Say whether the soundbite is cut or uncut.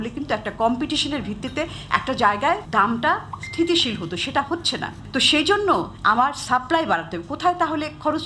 cut